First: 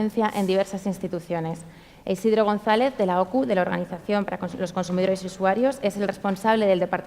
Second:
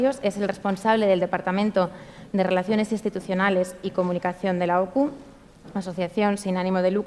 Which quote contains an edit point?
first; 1 cut; at 4.1 s

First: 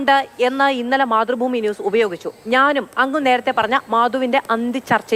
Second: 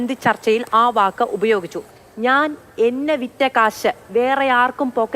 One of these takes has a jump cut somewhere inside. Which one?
second; 1 cut; at 2.0 s

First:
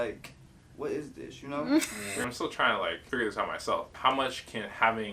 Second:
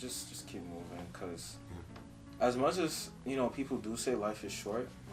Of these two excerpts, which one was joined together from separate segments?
first; 3 cuts; at 2.1 s, 3.0 s, 3.9 s

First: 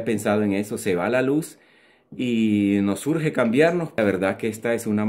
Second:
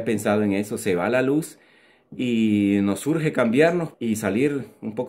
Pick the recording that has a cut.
first; 1 cut; at 4.0 s

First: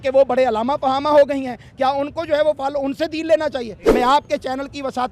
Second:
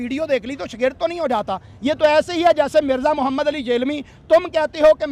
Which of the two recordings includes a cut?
first; 1 cut; at 3.8 s

